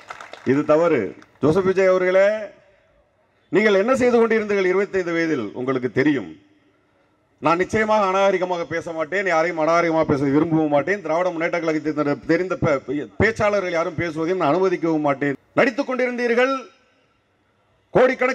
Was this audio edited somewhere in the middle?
yes; 2 cuts; at 1.2 s, 15.4 s

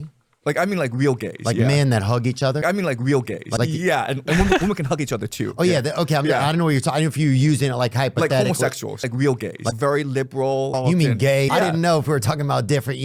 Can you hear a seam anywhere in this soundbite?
no; 0 cuts

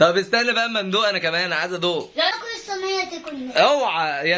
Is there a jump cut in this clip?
yes; 1 cut; at 2.3 s

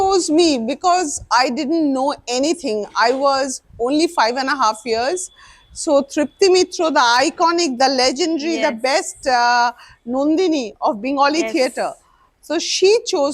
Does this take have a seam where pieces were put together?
no; 0 cuts

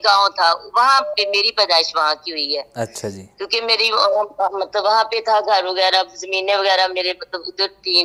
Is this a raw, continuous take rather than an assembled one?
yes; 0 cuts

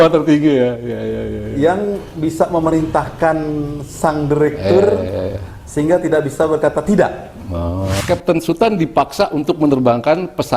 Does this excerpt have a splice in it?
yes; 1 cut; at 7.9 s

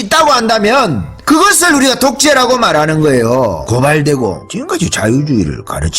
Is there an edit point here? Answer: yes; 2 cuts; at 3.6 s, 4.5 s

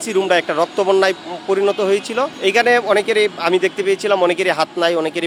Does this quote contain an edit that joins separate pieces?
no; 0 cuts

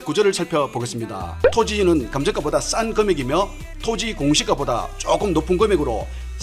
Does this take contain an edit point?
yes; 1 cut; at 1.3 s

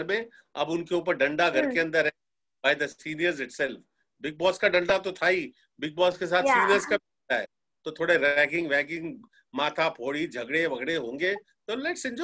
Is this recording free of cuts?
yes; 0 cuts

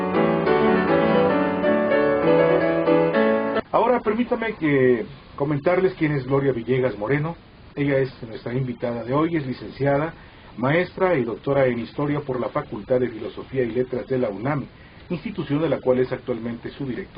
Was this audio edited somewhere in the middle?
no; 0 cuts

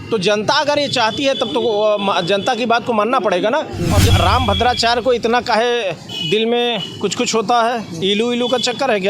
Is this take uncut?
no; 1 cut; at 4.1 s

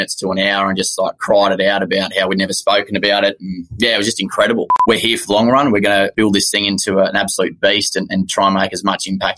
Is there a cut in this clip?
yes; 2 cuts; at 4.7 s, 6.1 s

